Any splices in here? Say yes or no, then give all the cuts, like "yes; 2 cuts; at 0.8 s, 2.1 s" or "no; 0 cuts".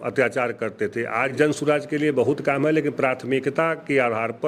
yes; 1 cut; at 1.3 s